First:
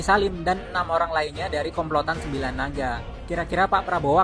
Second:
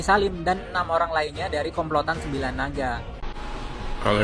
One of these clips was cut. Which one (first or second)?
second